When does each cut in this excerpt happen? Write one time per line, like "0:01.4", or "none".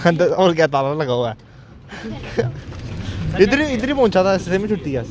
0:01.9